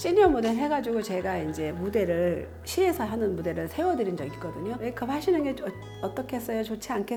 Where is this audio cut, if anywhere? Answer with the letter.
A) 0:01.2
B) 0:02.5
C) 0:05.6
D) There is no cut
D